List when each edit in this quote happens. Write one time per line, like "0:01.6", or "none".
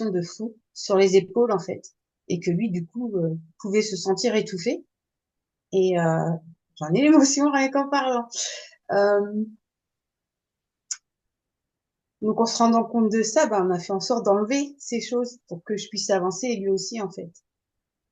none